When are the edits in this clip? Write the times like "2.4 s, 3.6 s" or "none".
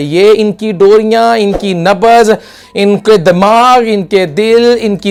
none